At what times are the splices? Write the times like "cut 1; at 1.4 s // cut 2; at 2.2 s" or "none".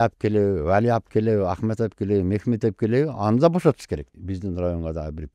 cut 1; at 4.1 s